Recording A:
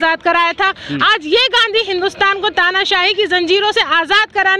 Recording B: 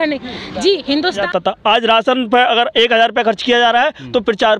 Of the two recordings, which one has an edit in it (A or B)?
B